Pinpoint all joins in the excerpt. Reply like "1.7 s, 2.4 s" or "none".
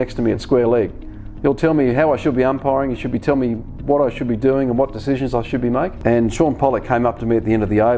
5.9 s